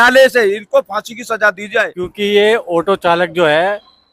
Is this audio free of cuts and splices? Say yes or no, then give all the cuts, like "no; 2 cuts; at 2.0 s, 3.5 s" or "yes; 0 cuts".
no; 1 cut; at 2.0 s